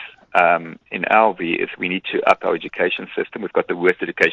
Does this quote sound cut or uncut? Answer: uncut